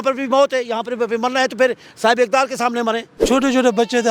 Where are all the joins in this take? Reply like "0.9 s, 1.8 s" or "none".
3.2 s